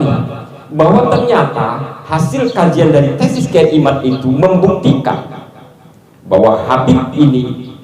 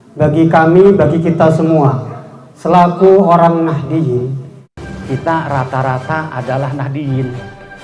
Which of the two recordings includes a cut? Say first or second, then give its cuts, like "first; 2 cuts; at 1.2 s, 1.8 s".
second; 1 cut; at 4.8 s